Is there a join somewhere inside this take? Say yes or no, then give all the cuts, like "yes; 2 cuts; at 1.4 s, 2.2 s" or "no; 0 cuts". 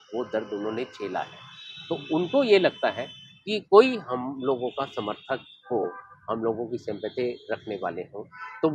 no; 0 cuts